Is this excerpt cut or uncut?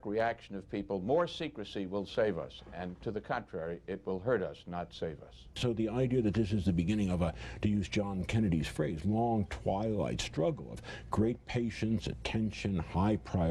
cut